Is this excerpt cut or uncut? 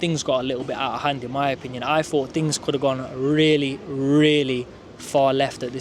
uncut